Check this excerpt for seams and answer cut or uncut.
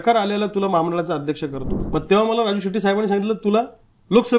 cut